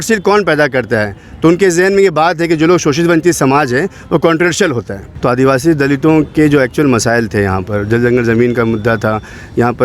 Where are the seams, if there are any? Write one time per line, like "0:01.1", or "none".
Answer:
0:05.0